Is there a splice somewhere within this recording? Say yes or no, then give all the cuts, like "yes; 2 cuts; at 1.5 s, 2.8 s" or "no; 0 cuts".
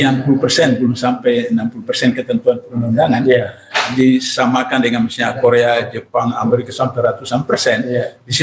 no; 0 cuts